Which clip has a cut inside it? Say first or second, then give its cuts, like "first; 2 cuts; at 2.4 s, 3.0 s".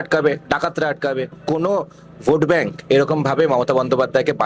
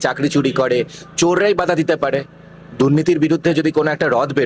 first; 1 cut; at 1.4 s